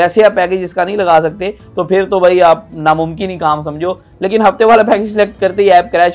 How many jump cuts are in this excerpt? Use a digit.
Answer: 2